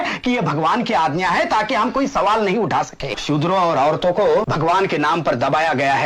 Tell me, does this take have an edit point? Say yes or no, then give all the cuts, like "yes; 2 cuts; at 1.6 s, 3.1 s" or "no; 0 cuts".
yes; 2 cuts; at 3.2 s, 4.5 s